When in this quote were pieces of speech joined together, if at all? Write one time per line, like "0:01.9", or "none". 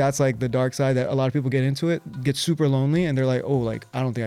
none